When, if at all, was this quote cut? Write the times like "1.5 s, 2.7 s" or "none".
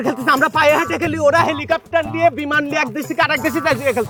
none